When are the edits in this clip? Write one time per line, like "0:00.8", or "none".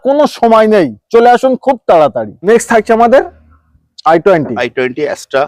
none